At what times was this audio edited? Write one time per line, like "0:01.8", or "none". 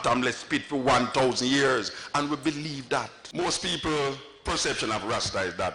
0:03.2

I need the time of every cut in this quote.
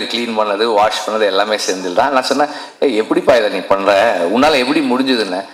none

